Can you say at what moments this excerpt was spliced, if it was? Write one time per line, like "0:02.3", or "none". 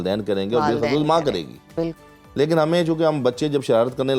none